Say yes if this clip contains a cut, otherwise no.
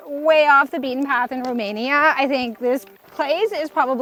no